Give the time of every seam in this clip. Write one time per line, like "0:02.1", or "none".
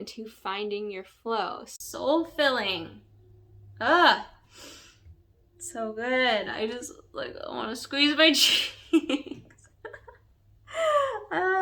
0:01.7

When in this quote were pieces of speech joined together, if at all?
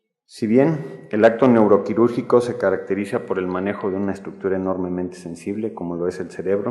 0:02.4

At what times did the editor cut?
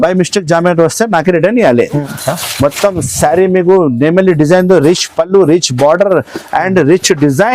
0:02.1

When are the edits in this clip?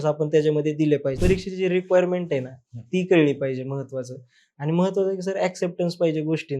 0:01.2

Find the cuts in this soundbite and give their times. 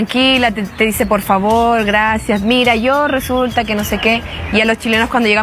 none

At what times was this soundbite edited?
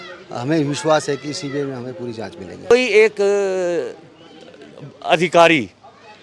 0:02.7

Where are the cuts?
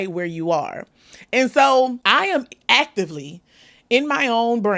none

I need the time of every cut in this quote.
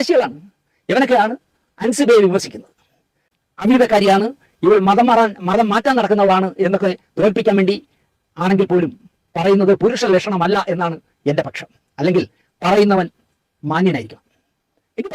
0:03.4

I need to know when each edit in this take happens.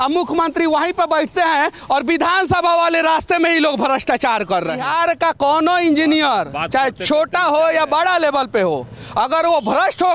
0:04.8

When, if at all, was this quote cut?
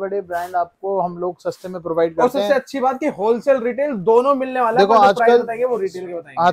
none

